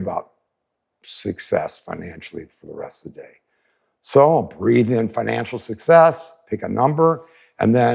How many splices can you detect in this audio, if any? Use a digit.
0